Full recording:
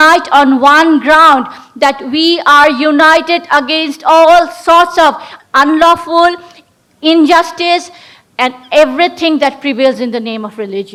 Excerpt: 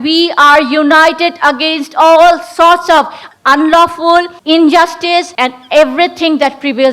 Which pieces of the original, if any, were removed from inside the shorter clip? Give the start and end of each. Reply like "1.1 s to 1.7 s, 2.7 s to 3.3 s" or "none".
6.4 s to 6.9 s, 7.9 s to 8.3 s